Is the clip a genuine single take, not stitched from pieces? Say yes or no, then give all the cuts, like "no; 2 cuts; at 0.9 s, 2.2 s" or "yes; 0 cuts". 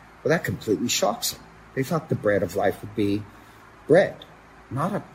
yes; 0 cuts